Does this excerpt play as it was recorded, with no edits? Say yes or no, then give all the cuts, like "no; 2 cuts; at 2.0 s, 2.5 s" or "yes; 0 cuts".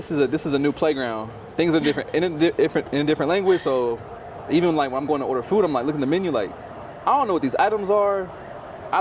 yes; 0 cuts